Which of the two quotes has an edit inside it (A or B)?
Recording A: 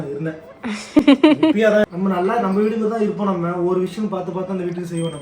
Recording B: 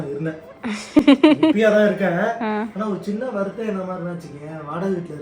A